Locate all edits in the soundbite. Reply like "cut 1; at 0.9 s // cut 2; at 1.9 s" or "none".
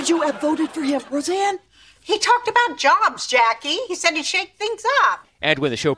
none